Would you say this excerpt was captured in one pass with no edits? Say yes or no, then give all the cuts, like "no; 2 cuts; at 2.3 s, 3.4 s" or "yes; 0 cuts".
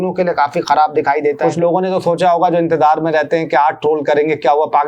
no; 1 cut; at 1.4 s